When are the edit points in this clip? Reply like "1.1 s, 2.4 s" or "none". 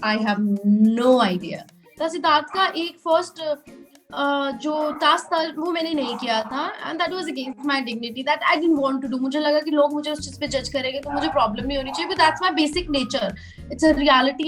1.9 s